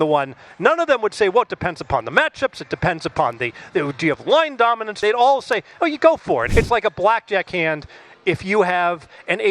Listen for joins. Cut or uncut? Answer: cut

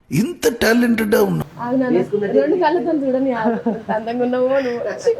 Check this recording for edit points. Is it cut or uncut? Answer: cut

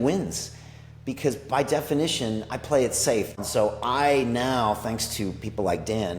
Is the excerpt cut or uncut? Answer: cut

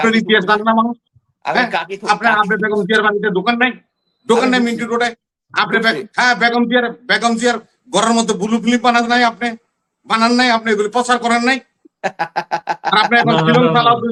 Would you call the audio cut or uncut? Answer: uncut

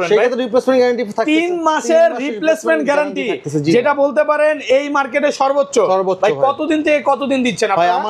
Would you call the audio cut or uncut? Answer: uncut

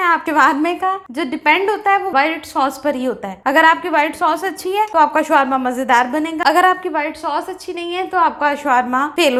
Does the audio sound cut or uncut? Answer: uncut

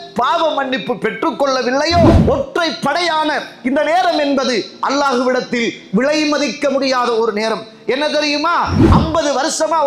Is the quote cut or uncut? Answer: cut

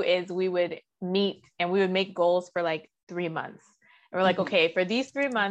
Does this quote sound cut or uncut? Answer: uncut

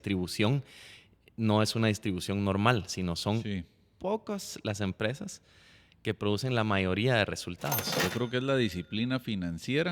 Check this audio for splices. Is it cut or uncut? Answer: cut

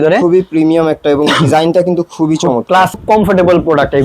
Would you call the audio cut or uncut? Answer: cut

